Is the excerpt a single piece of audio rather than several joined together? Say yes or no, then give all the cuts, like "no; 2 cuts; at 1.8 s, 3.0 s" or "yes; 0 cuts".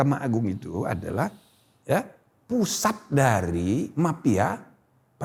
yes; 0 cuts